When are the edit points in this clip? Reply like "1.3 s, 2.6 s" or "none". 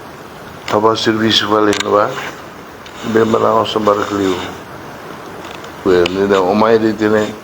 5.8 s